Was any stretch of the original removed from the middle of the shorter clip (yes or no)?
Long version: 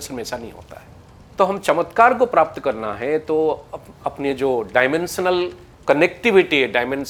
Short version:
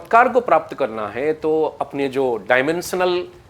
yes